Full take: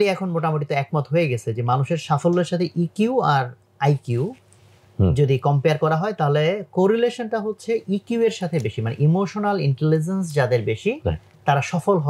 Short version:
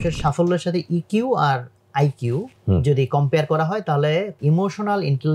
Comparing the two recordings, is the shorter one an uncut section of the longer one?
no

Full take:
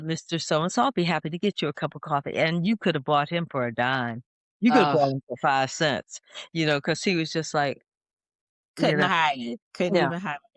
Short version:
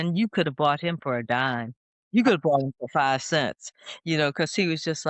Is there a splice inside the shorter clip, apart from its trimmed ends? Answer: no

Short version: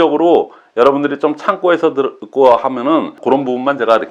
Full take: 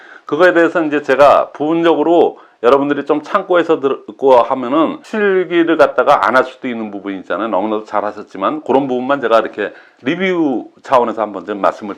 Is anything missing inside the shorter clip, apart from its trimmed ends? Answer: yes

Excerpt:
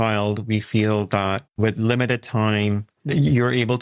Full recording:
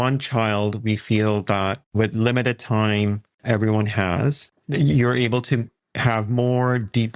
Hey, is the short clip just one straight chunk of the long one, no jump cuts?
no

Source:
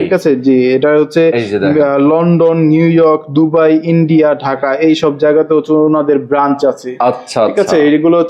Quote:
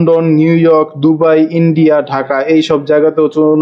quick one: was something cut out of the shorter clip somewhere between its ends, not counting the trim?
no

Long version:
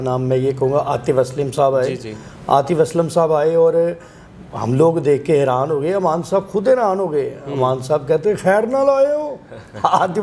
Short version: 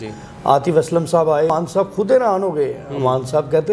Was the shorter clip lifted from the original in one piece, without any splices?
no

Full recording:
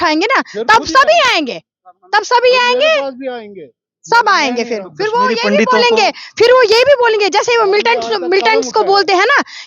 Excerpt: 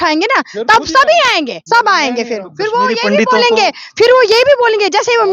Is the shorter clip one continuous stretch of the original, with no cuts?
no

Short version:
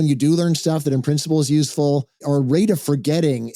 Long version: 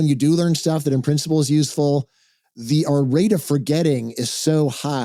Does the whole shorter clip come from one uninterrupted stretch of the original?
no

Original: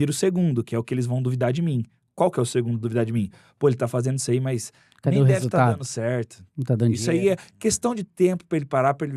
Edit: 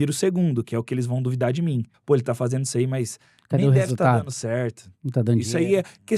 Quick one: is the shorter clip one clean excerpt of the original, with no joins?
no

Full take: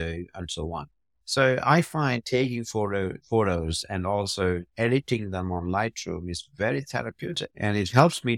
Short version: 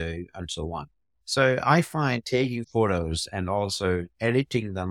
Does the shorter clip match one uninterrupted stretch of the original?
no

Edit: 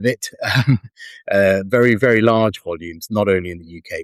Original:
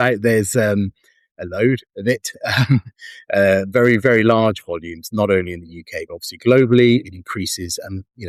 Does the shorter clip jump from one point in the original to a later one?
no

